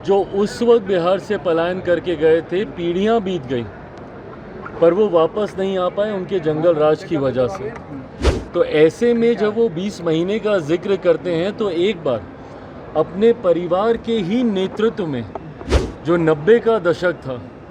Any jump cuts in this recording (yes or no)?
no